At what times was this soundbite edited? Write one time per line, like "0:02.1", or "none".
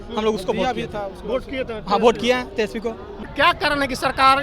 0:03.2